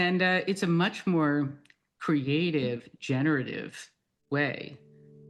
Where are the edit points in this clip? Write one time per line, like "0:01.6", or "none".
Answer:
none